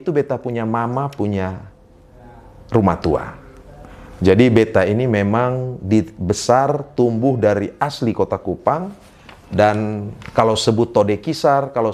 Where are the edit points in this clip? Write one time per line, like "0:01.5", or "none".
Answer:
none